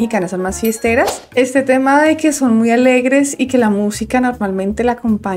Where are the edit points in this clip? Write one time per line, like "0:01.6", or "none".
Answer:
0:01.2